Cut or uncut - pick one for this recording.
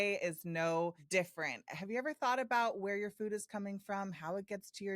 cut